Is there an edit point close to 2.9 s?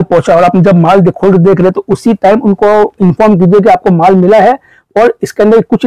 no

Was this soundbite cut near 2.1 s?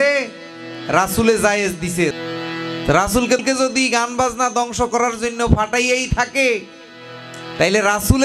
yes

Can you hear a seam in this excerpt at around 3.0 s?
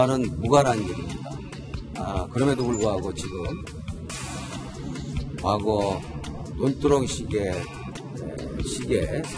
no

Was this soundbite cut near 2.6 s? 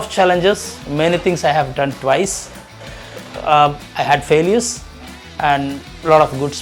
no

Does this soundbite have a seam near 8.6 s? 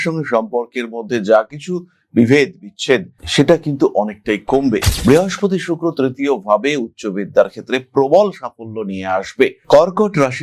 no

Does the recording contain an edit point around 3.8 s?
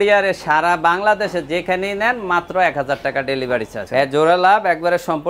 yes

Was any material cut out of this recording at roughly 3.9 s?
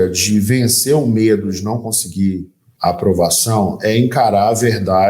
no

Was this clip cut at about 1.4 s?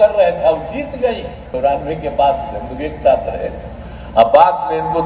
yes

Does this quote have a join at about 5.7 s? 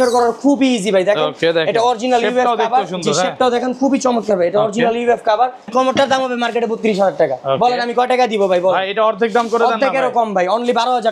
yes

